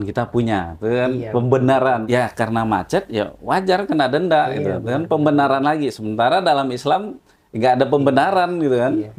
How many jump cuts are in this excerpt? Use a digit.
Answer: 1